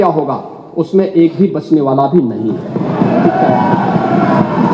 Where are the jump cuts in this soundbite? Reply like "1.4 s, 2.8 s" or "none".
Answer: none